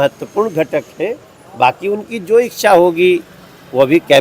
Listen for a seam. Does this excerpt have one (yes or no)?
no